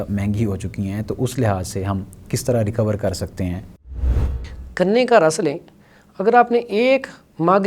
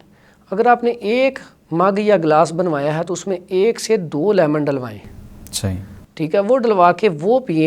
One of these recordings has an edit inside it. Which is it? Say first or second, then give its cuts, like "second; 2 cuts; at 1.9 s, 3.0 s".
first; 1 cut; at 4.1 s